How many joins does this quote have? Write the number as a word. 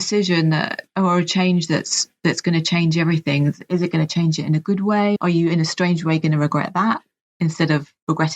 one